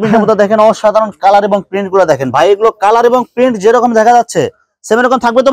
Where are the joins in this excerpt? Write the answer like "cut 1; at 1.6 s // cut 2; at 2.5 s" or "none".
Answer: none